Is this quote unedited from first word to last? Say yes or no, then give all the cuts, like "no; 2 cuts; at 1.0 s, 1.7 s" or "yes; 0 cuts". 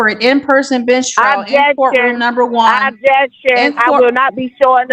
yes; 0 cuts